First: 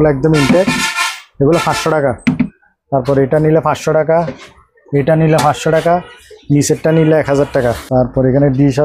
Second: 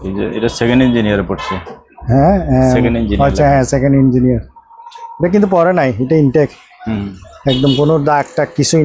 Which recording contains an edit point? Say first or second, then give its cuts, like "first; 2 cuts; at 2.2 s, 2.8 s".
first; 2 cuts; at 2.6 s, 7.8 s